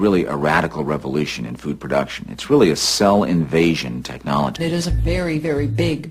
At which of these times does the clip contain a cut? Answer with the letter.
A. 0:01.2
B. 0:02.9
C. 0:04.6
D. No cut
C